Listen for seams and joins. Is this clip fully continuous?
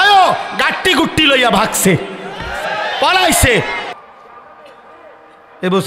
no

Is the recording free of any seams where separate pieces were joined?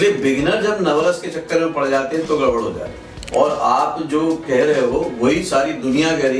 no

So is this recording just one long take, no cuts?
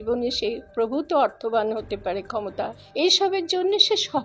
no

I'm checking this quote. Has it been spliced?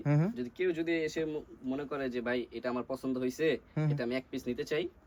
no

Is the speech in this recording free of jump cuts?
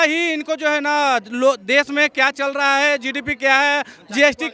yes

